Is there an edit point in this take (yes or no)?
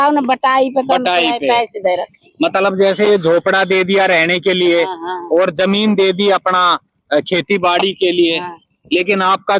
no